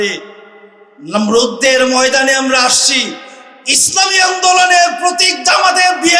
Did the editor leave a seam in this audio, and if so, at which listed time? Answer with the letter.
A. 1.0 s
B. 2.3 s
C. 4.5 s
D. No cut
D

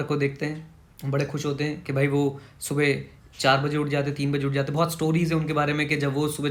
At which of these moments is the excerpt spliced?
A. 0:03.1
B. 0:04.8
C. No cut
C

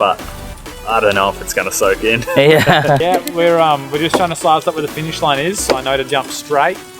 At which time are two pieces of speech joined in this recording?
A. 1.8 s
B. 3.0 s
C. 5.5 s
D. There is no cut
B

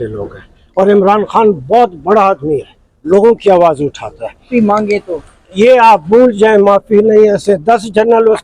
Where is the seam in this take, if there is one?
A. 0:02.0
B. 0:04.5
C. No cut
B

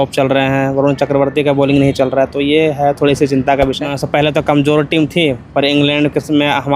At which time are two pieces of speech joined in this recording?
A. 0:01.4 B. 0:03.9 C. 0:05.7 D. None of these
B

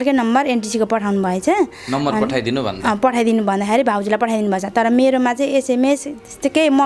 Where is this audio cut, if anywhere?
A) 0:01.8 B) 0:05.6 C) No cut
C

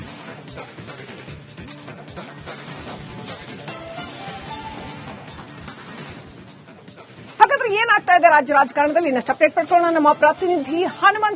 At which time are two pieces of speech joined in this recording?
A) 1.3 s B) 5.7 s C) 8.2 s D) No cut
A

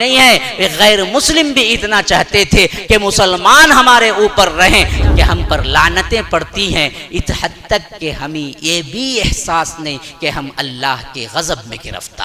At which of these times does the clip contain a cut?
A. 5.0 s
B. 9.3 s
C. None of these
A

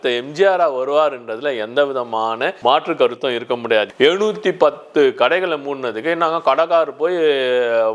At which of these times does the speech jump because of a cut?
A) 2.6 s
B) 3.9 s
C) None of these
B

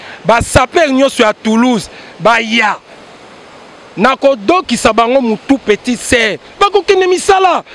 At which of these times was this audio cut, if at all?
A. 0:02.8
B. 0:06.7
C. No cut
C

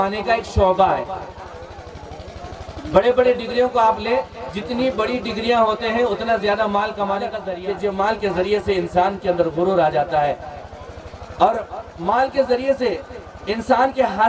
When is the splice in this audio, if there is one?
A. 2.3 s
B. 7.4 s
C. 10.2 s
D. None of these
B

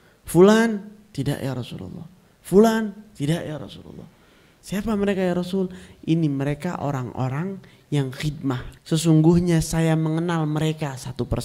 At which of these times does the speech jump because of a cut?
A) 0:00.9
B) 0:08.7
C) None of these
B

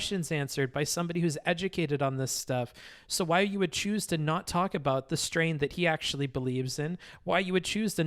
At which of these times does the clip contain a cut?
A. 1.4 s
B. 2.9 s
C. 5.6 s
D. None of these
D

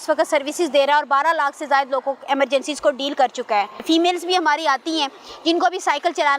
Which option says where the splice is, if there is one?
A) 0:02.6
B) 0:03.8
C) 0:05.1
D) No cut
D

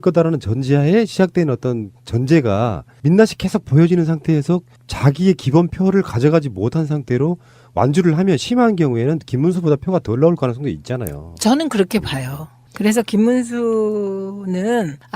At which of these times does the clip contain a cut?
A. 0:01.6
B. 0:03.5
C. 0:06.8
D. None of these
C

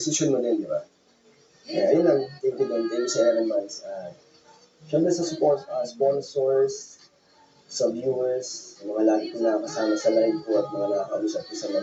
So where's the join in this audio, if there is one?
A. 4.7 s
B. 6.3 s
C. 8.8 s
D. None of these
D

